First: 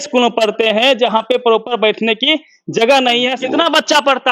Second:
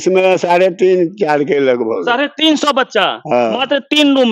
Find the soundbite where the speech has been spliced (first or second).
first